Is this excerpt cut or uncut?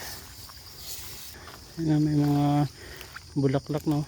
cut